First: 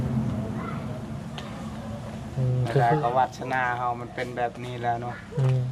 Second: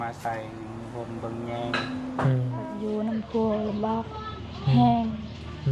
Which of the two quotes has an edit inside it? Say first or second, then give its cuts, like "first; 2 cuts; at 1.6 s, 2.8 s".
second; 1 cut; at 2.7 s